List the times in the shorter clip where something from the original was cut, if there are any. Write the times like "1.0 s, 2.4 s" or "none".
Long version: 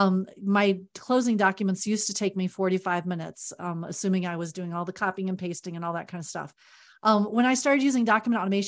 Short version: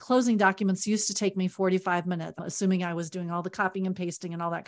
2.4 s